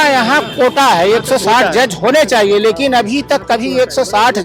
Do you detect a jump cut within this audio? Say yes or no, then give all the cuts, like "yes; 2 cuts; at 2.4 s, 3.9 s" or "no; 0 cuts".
no; 0 cuts